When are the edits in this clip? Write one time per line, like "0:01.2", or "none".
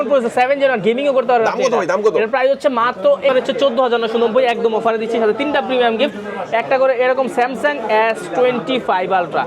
0:03.3